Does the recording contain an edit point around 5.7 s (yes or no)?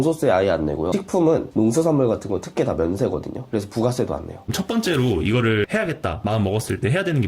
yes